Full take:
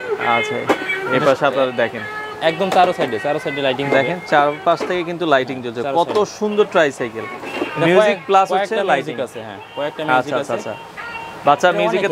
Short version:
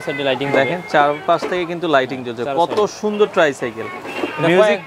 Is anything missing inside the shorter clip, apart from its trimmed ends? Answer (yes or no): no